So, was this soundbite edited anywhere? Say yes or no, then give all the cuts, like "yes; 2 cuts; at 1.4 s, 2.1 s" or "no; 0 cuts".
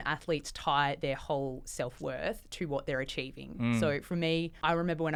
no; 0 cuts